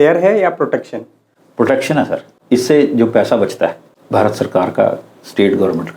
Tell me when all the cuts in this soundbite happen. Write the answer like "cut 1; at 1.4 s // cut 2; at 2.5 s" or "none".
cut 1; at 2.3 s // cut 2; at 3.9 s